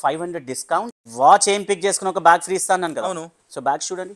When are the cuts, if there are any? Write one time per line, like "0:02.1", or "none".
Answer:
0:01.0